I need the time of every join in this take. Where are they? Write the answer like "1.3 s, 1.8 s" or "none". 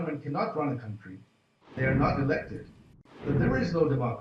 1.8 s, 3.1 s